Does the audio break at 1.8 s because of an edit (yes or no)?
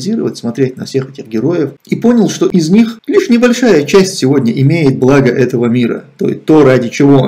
yes